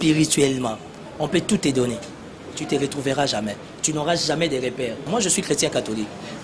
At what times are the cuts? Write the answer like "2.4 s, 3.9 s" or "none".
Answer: 5.1 s